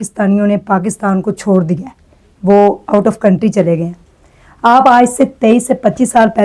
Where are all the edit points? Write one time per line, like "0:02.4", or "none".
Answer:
none